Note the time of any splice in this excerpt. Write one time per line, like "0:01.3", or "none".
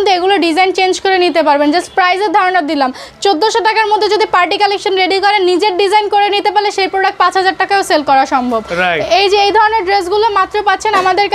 none